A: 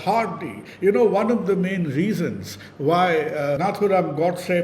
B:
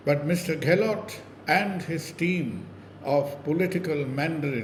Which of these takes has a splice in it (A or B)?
A